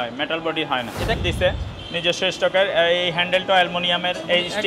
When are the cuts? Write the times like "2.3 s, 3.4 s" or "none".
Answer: 1.2 s